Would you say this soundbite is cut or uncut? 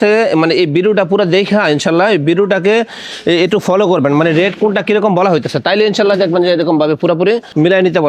uncut